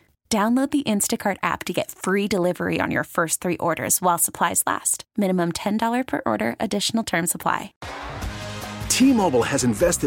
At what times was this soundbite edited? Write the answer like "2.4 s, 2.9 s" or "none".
7.7 s

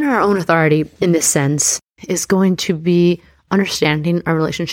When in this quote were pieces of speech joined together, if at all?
0.9 s

